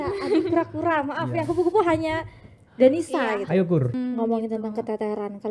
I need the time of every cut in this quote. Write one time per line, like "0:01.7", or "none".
0:04.0